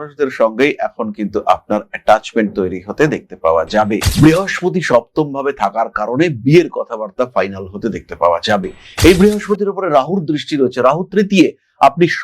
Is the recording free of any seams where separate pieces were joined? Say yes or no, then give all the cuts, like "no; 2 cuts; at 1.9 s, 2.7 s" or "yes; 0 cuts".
no; 1 cut; at 4.0 s